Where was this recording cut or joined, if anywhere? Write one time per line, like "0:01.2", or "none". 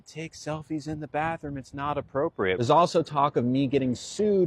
0:02.6